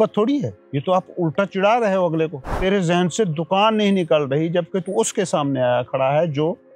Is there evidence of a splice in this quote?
yes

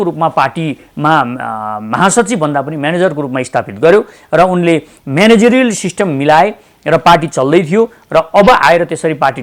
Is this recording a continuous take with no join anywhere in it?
yes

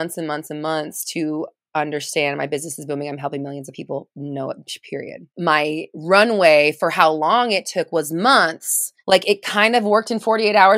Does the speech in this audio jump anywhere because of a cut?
yes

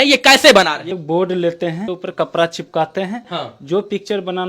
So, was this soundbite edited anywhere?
yes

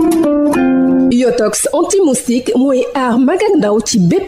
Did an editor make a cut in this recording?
yes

